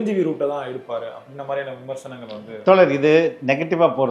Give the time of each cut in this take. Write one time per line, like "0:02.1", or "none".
none